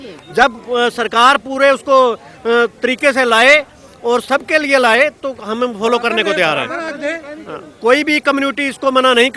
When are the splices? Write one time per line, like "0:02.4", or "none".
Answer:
none